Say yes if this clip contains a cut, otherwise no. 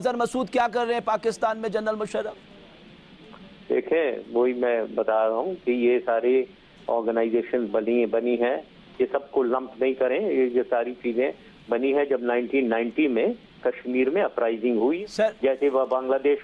no